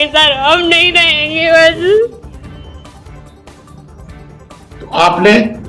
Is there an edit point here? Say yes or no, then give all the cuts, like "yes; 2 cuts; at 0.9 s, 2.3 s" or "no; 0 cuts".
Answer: no; 0 cuts